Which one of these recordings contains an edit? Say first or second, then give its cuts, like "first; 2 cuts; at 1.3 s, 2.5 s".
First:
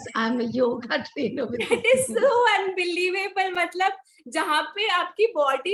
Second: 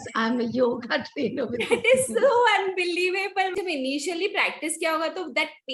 second; 1 cut; at 3.5 s